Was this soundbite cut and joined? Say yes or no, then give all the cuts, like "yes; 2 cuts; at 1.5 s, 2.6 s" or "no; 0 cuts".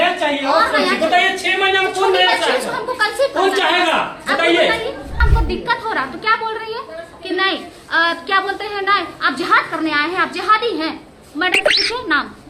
yes; 1 cut; at 5.2 s